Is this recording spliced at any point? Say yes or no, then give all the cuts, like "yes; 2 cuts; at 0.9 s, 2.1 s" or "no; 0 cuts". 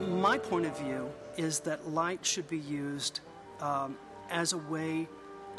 no; 0 cuts